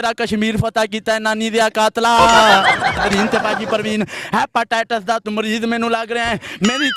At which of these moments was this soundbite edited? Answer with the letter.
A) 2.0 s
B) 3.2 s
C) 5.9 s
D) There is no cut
B